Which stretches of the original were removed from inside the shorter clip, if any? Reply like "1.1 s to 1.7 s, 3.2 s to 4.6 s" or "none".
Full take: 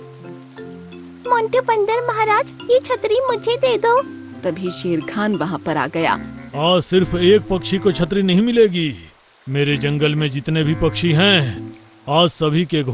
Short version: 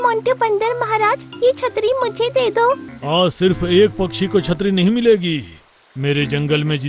4.2 s to 6.4 s